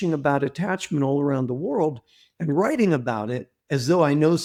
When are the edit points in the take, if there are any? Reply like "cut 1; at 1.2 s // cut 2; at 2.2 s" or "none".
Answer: none